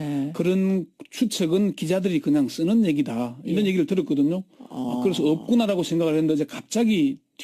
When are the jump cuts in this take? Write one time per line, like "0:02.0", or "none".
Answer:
none